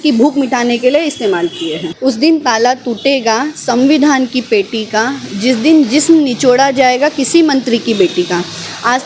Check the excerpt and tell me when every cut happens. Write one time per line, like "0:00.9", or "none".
0:01.9